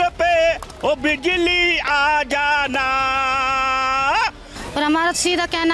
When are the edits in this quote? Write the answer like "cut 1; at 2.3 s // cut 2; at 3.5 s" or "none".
cut 1; at 4.5 s